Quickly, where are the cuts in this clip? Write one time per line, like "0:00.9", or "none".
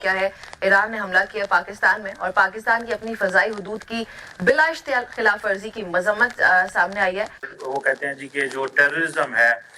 0:07.5